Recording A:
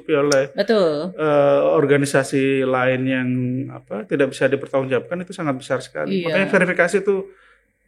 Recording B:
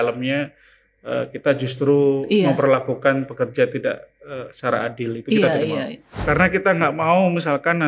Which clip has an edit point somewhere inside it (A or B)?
B